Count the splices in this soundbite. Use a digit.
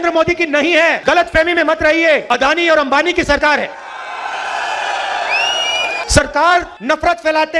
4